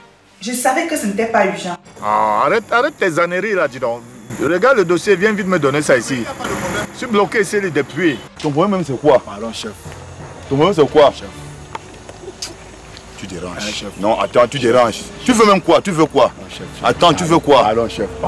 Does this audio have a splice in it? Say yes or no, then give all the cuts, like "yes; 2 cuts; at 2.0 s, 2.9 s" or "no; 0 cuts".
yes; 1 cut; at 8.4 s